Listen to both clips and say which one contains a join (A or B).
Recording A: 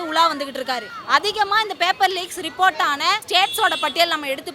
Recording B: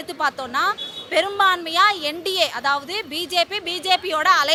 A